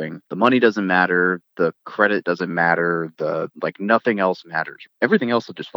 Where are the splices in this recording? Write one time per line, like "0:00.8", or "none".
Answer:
0:04.8